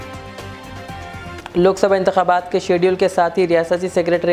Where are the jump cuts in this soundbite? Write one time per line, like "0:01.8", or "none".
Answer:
none